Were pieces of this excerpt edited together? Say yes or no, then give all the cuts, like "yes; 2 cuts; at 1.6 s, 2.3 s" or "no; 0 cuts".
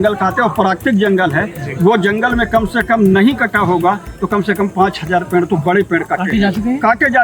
no; 0 cuts